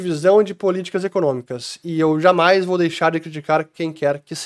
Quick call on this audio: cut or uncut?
uncut